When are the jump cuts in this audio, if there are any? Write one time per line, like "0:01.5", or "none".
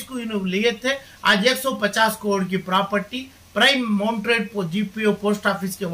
none